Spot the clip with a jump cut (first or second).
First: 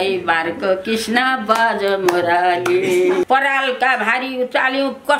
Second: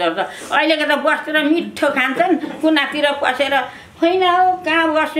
first